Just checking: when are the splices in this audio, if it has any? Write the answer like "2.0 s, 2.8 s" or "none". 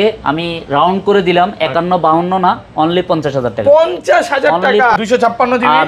4.9 s